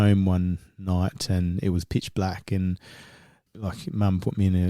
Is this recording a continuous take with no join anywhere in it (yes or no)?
no